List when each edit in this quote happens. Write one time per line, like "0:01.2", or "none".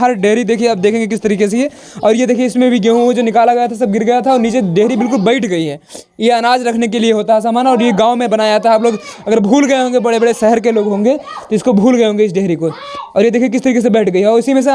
none